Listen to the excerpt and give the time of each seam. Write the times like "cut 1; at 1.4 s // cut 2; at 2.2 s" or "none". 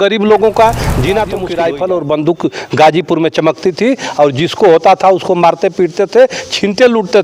cut 1; at 1.4 s